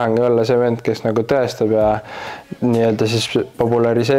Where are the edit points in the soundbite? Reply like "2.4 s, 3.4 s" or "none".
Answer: none